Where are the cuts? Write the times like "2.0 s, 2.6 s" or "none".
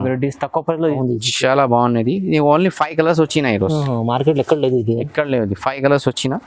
1.0 s